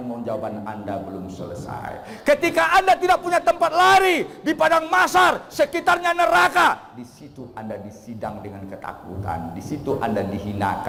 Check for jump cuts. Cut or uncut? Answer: uncut